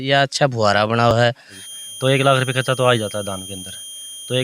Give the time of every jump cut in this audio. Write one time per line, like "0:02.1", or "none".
0:01.2